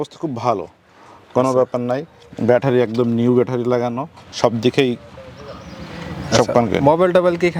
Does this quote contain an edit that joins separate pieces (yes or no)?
no